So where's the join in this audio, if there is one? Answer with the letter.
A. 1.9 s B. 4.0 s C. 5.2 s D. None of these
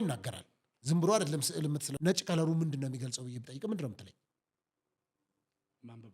A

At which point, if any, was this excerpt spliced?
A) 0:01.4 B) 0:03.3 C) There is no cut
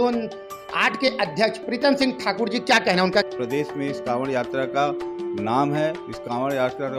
B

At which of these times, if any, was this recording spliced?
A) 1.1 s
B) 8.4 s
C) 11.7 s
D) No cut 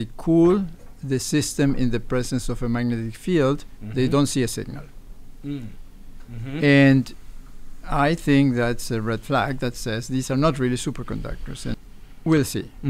C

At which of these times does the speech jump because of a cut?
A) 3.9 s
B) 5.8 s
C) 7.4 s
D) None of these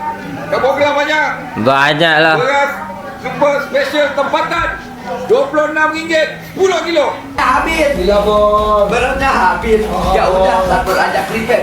C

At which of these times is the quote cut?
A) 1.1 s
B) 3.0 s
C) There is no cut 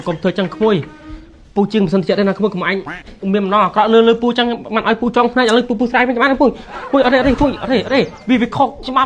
C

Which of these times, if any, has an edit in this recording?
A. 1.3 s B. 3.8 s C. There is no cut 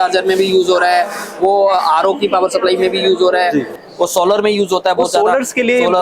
B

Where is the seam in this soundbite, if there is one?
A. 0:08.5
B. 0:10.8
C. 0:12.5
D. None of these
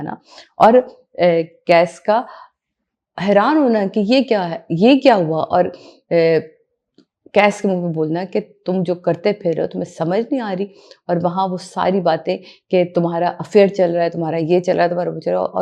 D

